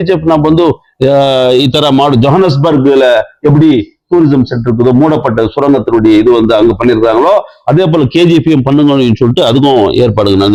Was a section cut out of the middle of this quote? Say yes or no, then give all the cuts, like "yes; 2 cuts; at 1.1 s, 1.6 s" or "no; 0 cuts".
no; 0 cuts